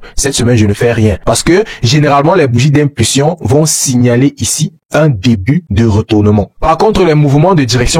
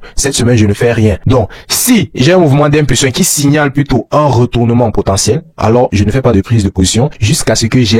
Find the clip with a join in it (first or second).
second